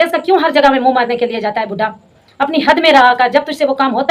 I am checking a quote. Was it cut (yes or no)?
no